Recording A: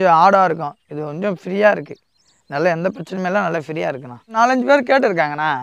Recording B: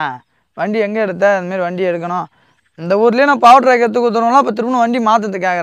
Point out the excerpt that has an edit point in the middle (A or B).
A